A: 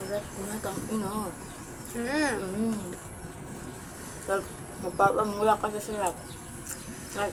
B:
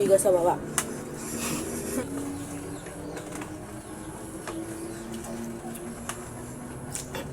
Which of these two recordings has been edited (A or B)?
B